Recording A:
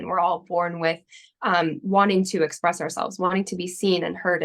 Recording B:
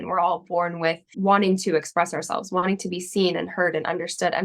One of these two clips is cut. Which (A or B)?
B